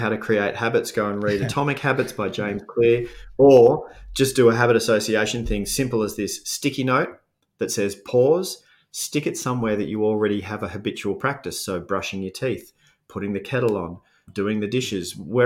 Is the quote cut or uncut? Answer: cut